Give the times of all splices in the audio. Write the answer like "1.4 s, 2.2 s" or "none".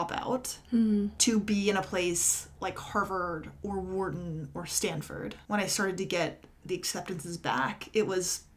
1.1 s, 5.4 s